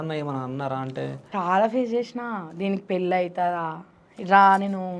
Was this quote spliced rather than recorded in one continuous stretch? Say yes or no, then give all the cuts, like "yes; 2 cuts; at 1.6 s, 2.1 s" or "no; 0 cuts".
yes; 1 cut; at 1.2 s